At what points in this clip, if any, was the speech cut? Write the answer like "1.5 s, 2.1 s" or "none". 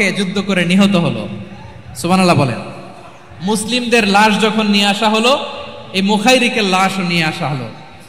none